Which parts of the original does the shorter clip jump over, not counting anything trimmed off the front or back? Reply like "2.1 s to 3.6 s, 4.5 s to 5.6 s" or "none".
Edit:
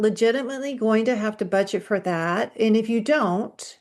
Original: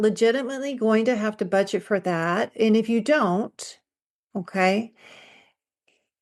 none